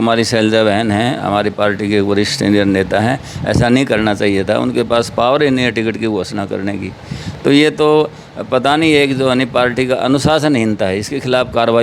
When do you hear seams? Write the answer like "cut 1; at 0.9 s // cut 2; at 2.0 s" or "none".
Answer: none